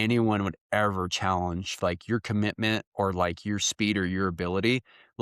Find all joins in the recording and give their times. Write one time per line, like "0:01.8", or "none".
none